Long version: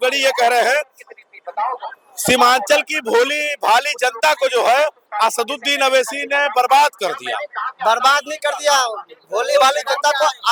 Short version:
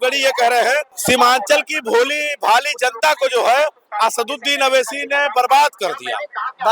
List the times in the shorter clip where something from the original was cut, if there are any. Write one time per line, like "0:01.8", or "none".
0:00.9